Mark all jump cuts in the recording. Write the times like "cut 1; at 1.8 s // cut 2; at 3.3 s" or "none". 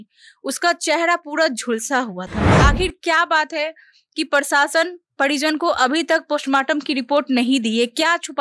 cut 1; at 2.6 s